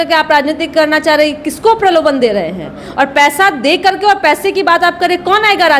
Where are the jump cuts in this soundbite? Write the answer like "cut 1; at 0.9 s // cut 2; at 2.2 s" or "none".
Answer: none